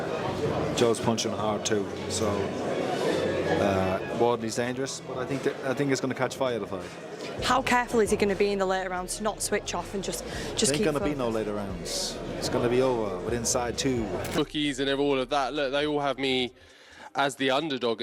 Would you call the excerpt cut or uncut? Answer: cut